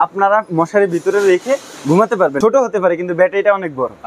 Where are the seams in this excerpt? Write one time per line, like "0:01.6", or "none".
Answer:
0:02.4